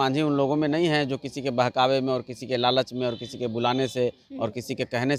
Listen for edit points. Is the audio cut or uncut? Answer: uncut